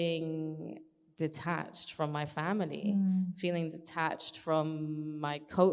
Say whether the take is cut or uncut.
uncut